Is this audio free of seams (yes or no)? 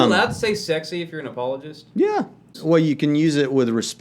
no